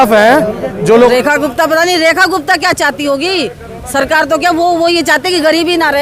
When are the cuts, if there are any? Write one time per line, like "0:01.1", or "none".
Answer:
0:01.1